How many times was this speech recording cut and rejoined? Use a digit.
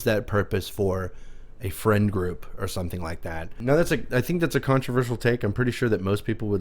1